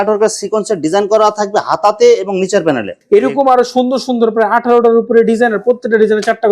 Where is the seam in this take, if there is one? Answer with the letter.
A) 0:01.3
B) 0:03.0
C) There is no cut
B